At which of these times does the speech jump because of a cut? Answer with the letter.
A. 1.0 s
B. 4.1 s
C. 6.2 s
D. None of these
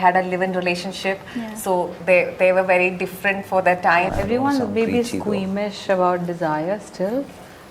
B